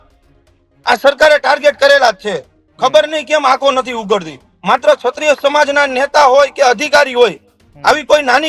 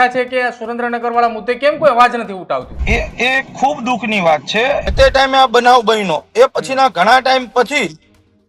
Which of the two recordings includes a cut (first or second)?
second